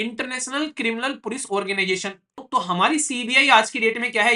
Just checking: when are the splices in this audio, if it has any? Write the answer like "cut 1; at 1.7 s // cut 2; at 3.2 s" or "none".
cut 1; at 2.4 s

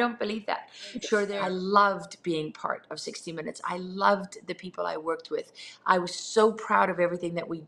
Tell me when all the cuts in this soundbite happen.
cut 1; at 1.3 s

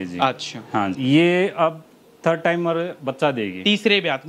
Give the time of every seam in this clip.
cut 1; at 0.9 s

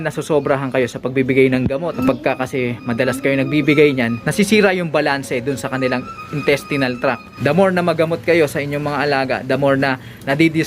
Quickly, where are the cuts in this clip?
cut 1; at 1.9 s // cut 2; at 4.2 s // cut 3; at 7.3 s

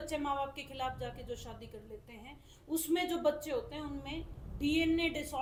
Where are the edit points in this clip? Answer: none

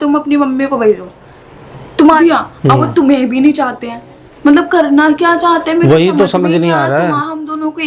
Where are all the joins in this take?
cut 1; at 2.2 s

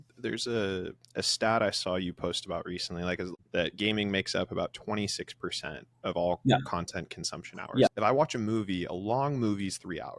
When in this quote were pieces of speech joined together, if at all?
cut 1; at 3.3 s // cut 2; at 7.9 s

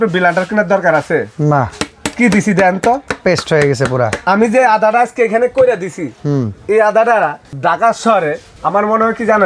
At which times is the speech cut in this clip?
none

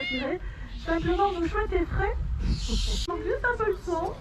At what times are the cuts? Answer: cut 1; at 3.0 s

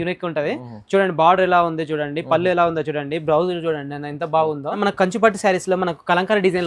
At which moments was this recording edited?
cut 1; at 4.8 s

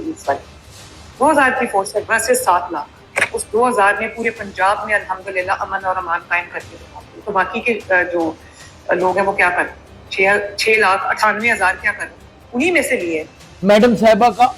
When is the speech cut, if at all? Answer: cut 1; at 13.5 s

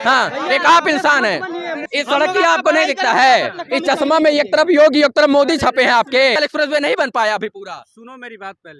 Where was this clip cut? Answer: cut 1; at 1.8 s // cut 2; at 6.4 s

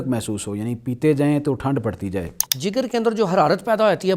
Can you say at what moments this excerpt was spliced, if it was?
cut 1; at 2.5 s

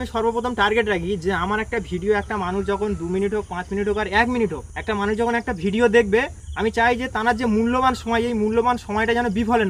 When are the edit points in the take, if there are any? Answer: cut 1; at 4.7 s // cut 2; at 6.4 s

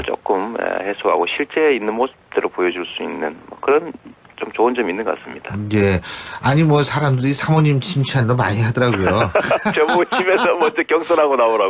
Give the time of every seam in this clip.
none

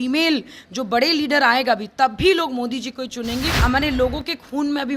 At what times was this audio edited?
cut 1; at 3.6 s

